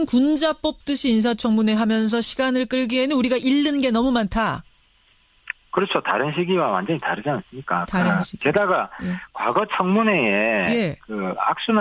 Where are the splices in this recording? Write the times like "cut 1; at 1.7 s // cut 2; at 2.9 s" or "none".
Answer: cut 1; at 1.9 s